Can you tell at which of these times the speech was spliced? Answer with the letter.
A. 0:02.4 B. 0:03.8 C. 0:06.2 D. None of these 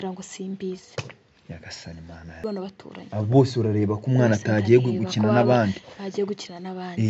A